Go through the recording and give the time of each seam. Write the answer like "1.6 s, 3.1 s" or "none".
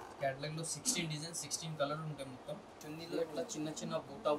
2.7 s